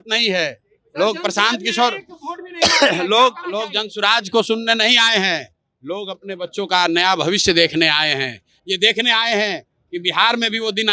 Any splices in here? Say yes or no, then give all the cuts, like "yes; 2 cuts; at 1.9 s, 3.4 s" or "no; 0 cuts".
no; 0 cuts